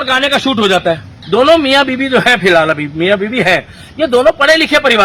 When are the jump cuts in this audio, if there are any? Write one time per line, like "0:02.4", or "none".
0:01.1

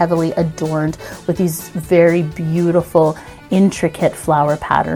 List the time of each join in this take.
none

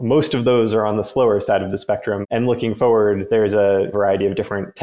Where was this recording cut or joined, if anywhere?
0:02.2
0:03.9

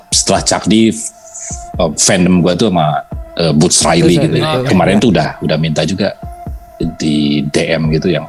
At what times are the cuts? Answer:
0:04.6

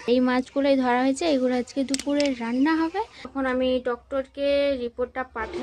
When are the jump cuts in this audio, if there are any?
0:03.3

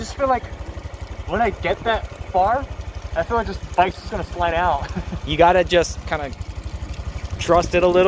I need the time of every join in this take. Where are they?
none

